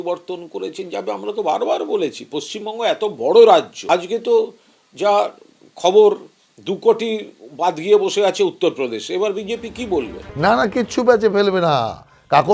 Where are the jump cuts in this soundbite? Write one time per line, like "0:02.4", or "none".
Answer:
0:10.2